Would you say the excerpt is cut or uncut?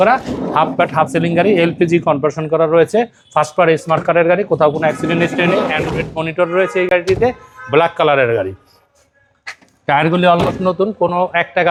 uncut